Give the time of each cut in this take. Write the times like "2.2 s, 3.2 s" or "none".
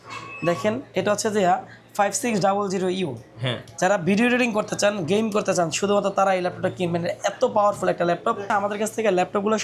8.5 s